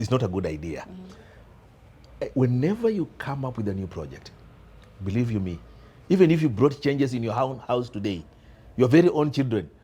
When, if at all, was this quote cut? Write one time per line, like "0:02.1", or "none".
none